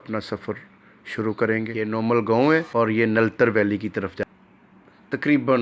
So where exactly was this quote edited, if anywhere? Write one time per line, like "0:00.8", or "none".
0:01.7
0:04.3